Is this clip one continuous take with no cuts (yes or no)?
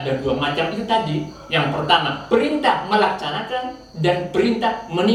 yes